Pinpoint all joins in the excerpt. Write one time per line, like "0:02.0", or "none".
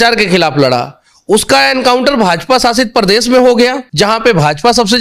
0:03.8